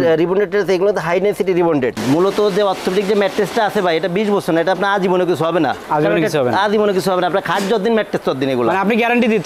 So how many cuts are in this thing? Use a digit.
1